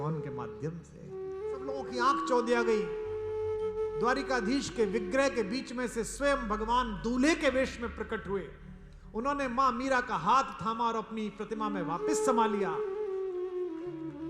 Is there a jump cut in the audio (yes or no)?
yes